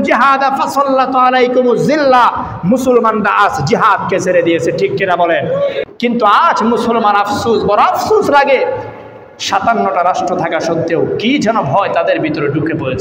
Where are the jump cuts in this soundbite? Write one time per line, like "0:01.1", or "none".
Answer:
0:05.9